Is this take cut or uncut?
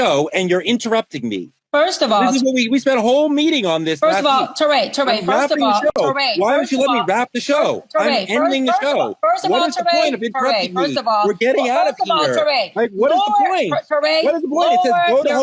uncut